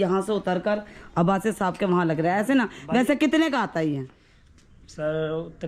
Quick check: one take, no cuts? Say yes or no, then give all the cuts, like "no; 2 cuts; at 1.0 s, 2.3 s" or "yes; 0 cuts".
yes; 0 cuts